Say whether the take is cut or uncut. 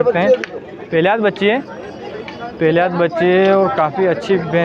uncut